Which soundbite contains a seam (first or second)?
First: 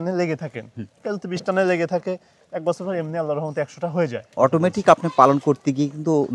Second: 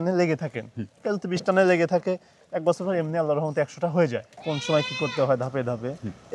second